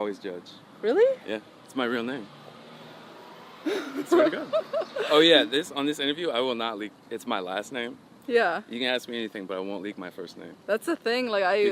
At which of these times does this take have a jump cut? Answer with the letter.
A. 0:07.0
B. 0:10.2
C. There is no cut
C